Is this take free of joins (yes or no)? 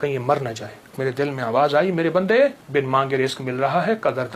no